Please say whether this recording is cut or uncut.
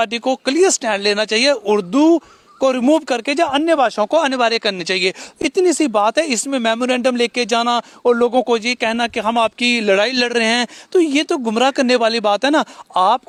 uncut